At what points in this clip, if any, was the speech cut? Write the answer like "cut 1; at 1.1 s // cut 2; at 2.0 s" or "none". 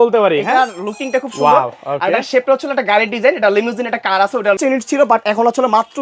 cut 1; at 4.6 s